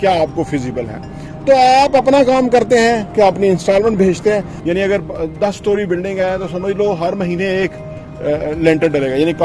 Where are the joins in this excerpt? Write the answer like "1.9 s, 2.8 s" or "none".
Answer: 4.5 s

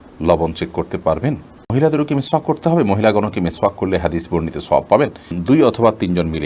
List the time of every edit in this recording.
1.7 s, 5.4 s

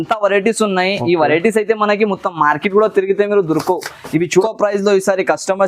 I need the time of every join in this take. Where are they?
4.4 s

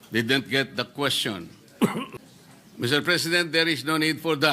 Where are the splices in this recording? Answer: 2.1 s

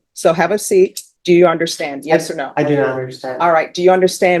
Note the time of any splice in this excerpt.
1.1 s

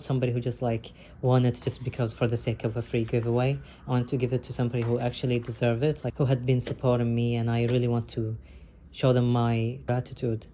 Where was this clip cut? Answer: none

